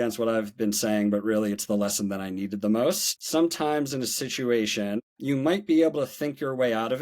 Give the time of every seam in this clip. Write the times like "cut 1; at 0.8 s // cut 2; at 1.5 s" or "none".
cut 1; at 3.1 s // cut 2; at 5.0 s